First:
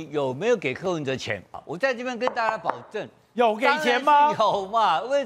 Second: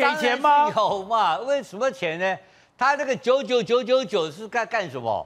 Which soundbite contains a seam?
first; 1 cut; at 1.6 s

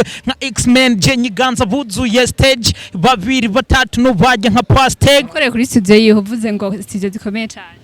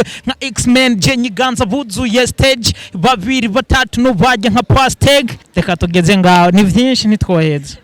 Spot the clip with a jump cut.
first; 1 cut; at 5.3 s

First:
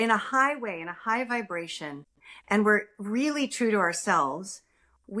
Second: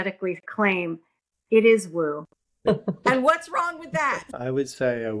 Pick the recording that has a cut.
second; 2 cuts; at 2.6 s, 4.2 s

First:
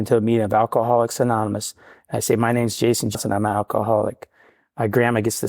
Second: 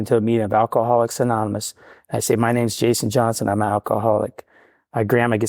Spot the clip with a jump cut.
first; 1 cut; at 3.1 s

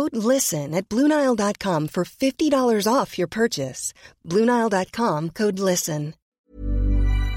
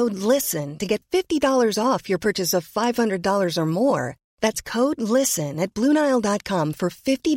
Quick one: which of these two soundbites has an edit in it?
first; 1 cut; at 6.2 s

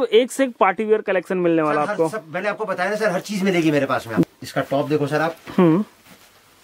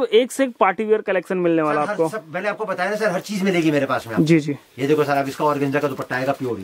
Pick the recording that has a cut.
first; 1 cut; at 4.3 s

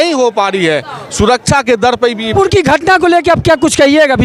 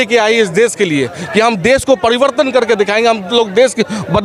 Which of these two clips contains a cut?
first; 1 cut; at 2.3 s

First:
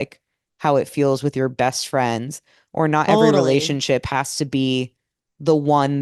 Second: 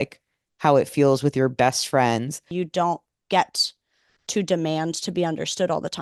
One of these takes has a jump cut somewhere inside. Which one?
second; 1 cut; at 2.4 s

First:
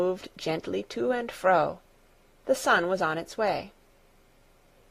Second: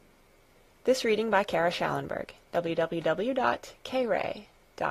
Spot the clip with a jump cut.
first; 1 cut; at 3.7 s

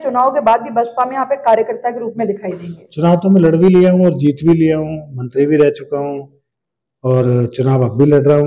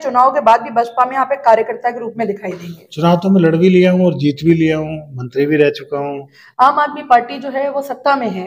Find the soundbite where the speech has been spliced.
second; 1 cut; at 6.4 s

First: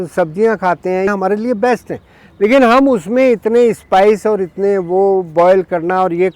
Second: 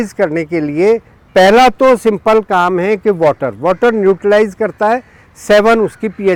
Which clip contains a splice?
first; 1 cut; at 1.1 s

